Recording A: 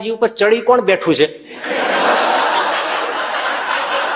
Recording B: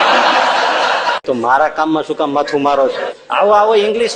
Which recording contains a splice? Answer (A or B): B